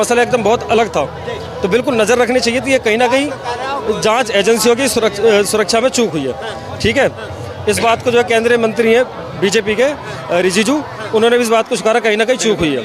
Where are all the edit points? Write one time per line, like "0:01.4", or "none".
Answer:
none